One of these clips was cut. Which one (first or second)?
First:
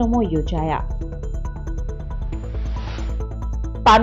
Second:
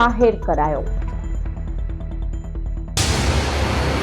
second